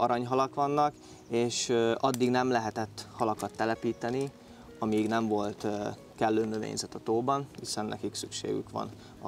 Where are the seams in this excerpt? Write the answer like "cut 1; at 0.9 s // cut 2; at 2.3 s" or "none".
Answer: none